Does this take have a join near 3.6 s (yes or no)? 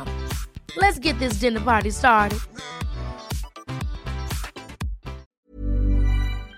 no